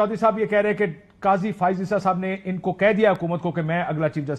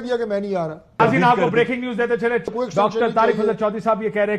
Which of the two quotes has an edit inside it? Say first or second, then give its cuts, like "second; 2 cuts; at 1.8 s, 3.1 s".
second; 2 cuts; at 1.0 s, 2.5 s